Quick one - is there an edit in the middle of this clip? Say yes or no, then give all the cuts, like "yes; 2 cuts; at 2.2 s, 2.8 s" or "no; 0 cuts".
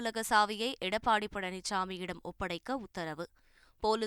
no; 0 cuts